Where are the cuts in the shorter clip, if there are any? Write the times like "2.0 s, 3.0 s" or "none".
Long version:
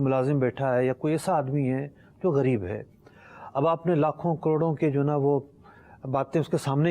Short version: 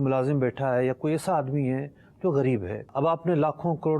2.8 s

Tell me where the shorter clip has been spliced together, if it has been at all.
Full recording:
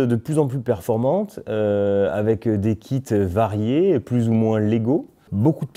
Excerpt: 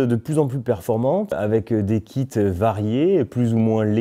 1.4 s

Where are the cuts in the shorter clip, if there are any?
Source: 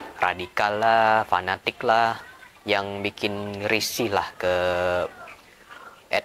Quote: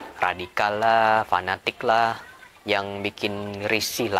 none

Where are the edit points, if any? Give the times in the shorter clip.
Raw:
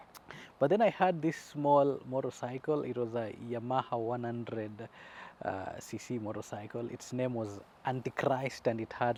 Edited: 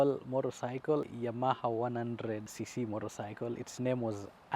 1.1 s, 2.5 s

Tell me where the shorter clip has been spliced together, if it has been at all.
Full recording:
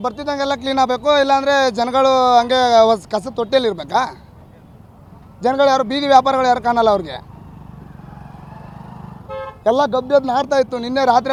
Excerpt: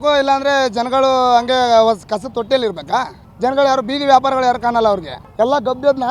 3.2 s, 5.2 s

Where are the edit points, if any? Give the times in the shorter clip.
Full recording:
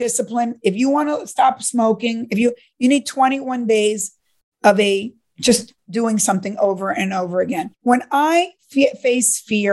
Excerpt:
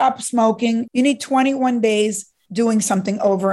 0.9 s, 2.4 s

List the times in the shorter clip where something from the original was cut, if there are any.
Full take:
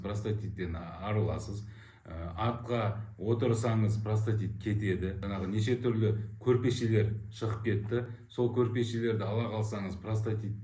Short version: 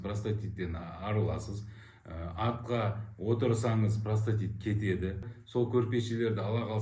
5.2 s

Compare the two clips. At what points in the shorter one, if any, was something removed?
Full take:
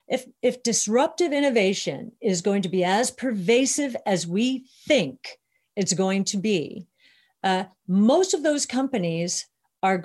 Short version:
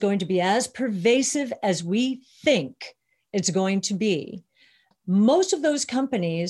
4.9 s

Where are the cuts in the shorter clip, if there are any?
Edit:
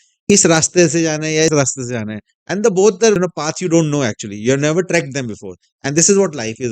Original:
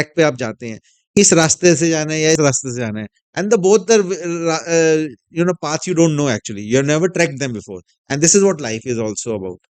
3.2 s

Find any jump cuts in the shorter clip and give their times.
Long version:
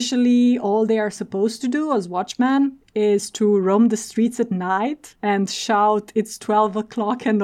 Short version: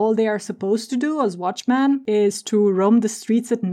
2.0 s

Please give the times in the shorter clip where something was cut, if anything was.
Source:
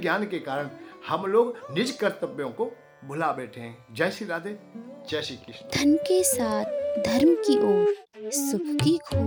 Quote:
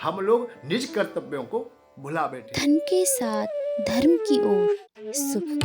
2.1 s

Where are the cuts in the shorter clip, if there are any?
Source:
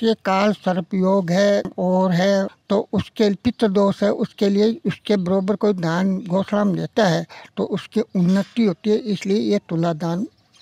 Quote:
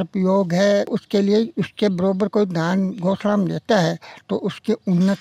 0.9 s

